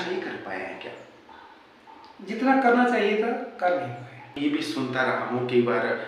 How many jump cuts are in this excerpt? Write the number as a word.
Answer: one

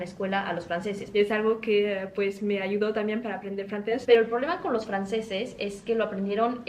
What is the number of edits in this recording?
two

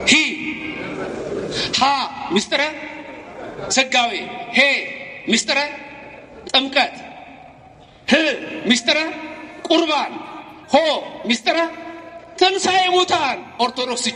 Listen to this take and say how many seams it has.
zero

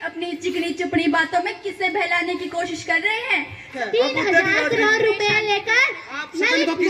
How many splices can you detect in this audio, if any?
one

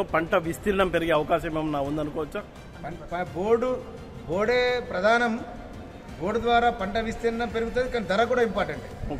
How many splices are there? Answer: zero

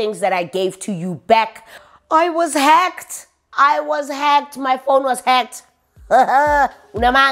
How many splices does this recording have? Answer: one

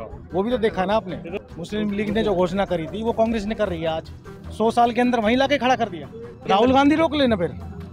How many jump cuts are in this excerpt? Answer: two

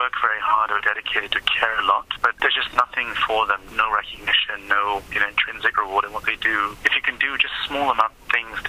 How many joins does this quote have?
four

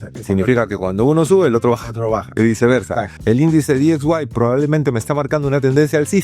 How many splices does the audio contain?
one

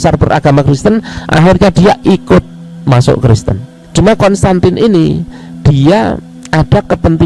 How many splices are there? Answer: two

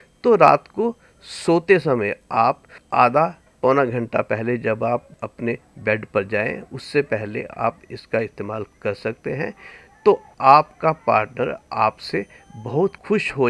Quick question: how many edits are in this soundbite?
four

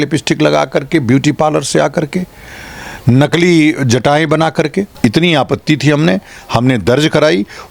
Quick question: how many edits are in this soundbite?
one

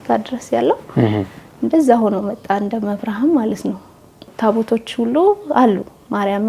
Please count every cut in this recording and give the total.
one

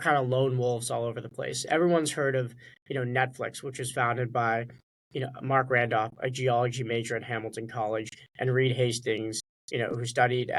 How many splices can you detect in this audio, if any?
zero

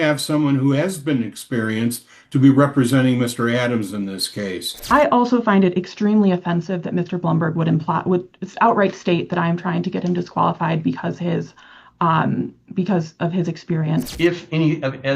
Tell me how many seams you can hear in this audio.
two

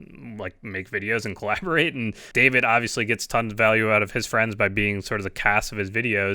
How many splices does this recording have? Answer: one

